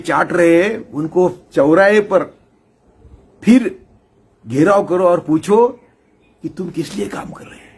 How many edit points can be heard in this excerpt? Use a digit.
0